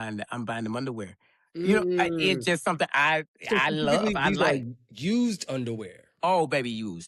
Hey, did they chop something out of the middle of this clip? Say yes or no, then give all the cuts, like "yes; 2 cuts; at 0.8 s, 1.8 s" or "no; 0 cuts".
no; 0 cuts